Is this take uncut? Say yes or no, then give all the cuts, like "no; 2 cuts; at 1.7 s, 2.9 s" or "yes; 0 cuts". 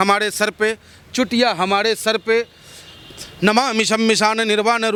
yes; 0 cuts